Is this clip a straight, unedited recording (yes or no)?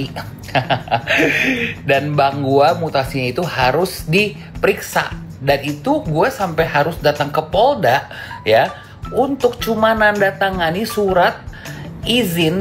yes